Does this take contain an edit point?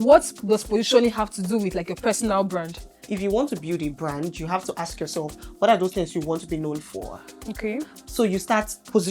yes; 1 cut; at 3.0 s

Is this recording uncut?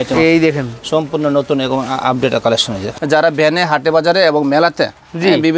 no; 1 cut; at 2.9 s

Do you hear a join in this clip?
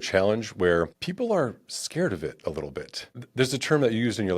yes; 2 cuts; at 1.0 s, 3.2 s

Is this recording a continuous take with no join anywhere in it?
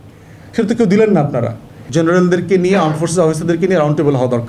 no; 1 cut; at 1.9 s

